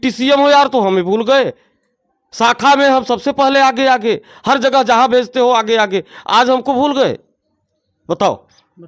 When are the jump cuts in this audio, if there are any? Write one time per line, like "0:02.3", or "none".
none